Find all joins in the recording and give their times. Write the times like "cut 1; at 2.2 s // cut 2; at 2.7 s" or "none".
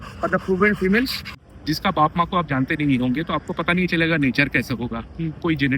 cut 1; at 1.3 s